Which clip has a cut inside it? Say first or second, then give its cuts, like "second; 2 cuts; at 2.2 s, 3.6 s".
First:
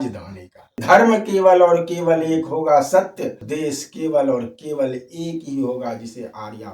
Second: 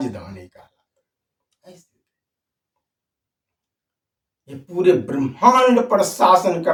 first; 2 cuts; at 0.8 s, 3.5 s